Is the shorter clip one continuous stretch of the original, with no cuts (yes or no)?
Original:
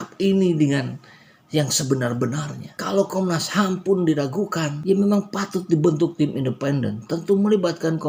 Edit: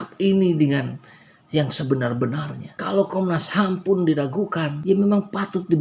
yes